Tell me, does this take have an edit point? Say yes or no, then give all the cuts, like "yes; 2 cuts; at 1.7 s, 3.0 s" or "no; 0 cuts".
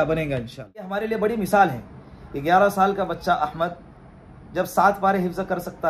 yes; 1 cut; at 1.0 s